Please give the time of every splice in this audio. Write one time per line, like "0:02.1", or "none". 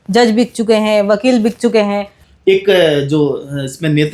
0:02.2